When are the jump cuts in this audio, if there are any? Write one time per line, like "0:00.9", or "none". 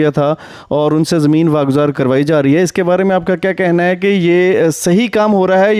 0:01.9